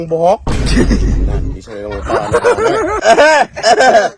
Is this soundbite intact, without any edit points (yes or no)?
no